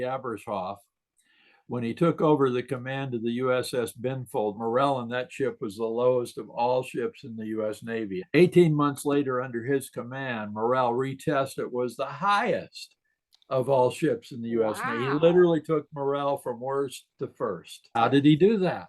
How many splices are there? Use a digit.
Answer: 3